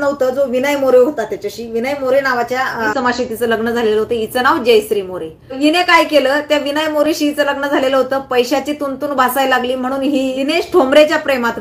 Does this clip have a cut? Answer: yes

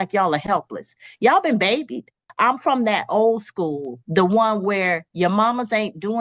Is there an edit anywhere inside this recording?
yes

